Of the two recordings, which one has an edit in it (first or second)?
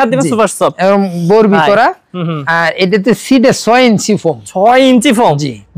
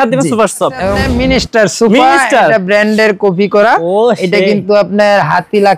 second